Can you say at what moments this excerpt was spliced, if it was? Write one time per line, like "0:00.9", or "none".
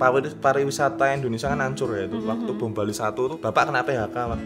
0:03.4